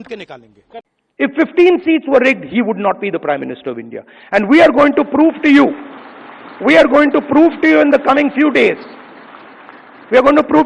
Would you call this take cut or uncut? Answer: cut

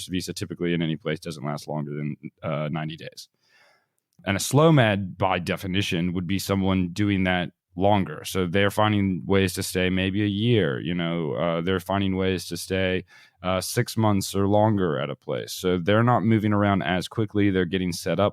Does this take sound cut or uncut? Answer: cut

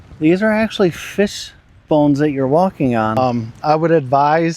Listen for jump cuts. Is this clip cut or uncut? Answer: cut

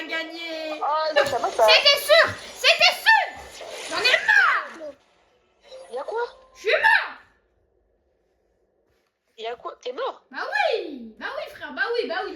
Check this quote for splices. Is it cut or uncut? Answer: cut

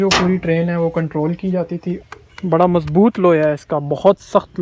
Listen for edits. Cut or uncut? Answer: cut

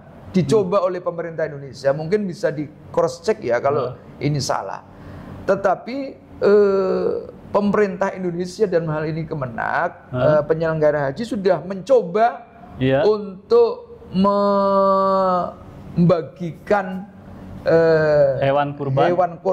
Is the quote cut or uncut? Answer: uncut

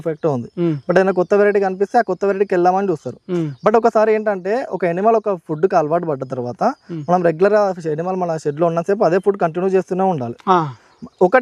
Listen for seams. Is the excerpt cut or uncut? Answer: uncut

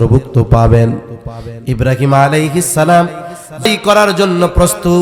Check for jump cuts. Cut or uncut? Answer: cut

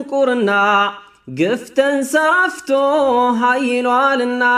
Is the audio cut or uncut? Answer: uncut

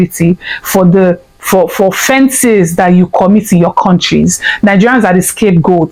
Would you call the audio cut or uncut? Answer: uncut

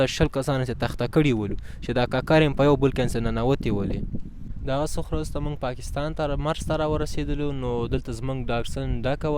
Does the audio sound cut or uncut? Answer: uncut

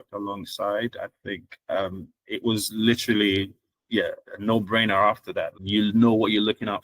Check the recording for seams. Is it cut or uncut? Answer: cut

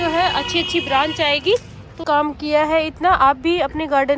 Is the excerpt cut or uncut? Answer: cut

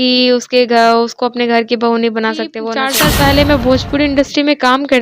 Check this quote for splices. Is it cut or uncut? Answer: cut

